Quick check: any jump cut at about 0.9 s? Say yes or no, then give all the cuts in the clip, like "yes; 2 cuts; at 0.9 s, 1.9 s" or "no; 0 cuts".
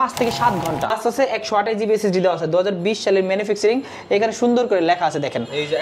yes; 1 cut; at 0.9 s